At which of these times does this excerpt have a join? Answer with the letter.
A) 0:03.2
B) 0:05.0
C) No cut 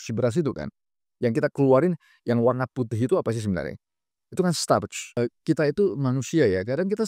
B